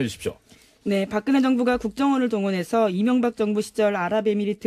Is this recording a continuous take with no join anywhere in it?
no; 1 cut; at 1.8 s

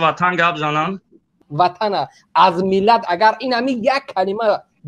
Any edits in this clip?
yes; 1 cut; at 1.4 s

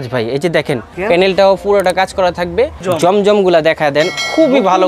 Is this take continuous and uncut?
no; 2 cuts; at 0.9 s, 2.8 s

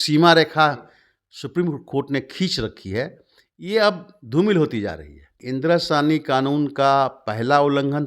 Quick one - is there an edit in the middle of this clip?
yes; 1 cut; at 5.4 s

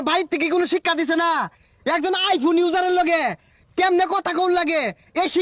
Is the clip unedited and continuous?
yes; 0 cuts

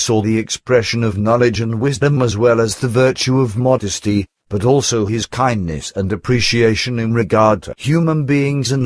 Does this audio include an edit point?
yes; 1 cut; at 2.7 s

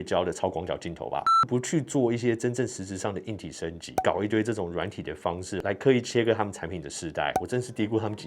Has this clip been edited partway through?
yes; 3 cuts; at 1.4 s, 3.9 s, 7.4 s

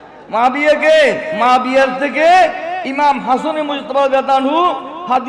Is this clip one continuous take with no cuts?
no; 1 cut; at 1.3 s

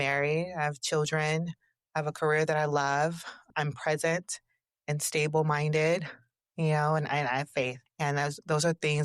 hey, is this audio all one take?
no; 1 cut; at 7.8 s

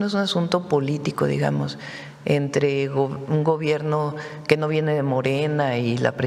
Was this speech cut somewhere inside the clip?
no; 0 cuts

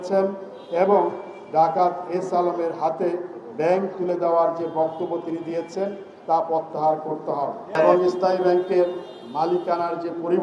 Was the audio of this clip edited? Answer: yes; 1 cut; at 7.8 s

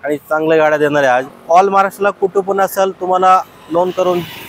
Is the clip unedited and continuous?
no; 1 cut; at 1.4 s

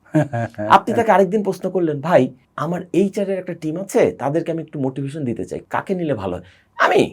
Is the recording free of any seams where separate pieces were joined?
no; 2 cuts; at 2.5 s, 5.6 s

